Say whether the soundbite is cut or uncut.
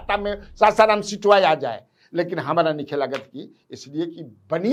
uncut